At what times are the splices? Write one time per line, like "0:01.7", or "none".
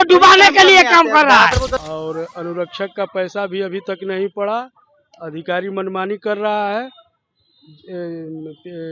0:01.7